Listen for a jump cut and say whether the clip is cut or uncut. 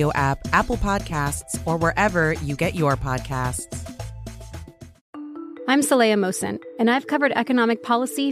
cut